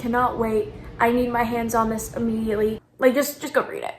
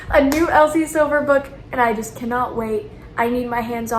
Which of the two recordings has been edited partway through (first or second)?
first